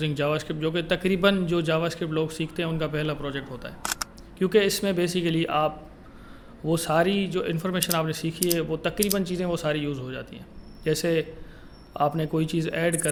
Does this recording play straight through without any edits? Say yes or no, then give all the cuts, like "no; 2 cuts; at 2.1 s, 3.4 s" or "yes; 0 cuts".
yes; 0 cuts